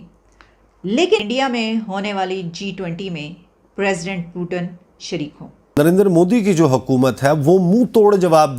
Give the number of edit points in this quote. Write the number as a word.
two